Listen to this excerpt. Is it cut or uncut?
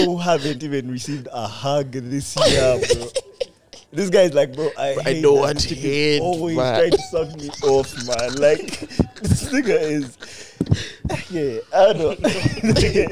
uncut